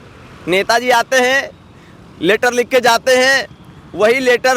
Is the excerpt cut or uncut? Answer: uncut